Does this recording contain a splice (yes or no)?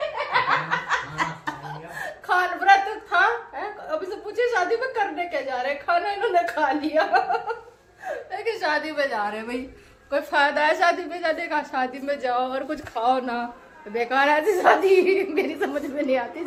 no